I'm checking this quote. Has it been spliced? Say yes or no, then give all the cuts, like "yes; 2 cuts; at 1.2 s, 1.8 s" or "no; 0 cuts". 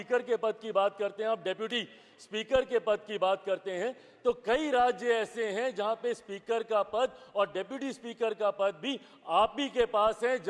no; 0 cuts